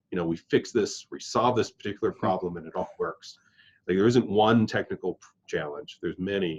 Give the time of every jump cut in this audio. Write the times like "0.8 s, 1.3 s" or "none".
none